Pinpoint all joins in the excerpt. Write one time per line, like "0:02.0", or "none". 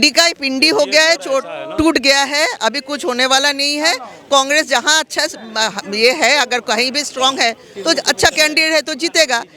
none